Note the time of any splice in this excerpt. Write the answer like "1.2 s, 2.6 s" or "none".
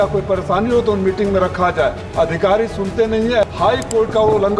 2.0 s, 3.4 s